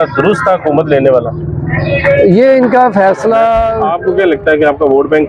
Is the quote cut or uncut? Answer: cut